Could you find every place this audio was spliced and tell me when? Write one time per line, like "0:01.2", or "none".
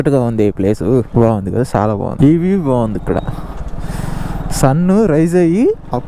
none